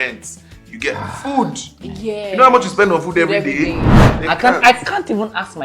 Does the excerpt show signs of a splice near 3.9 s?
yes; 1 cut; at 3.9 s

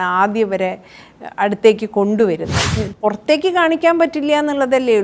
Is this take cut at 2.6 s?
yes; 1 cut; at 2.6 s

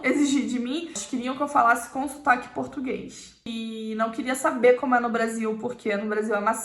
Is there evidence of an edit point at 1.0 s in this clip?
yes; 2 cuts; at 1.0 s, 3.5 s

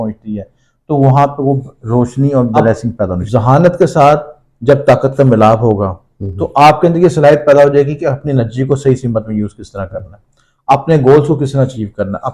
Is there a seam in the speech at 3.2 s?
yes; 1 cut; at 3.2 s

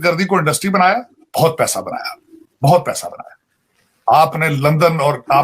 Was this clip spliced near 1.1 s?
no; 0 cuts

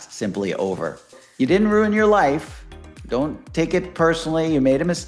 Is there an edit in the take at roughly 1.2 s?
yes; 1 cut; at 1.2 s

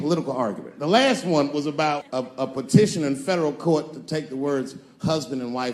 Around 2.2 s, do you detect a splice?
yes; 1 cut; at 2.2 s

